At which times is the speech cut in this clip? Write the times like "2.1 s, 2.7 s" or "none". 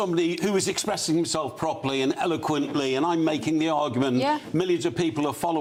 none